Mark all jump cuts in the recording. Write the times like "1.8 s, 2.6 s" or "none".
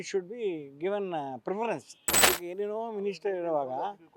2.1 s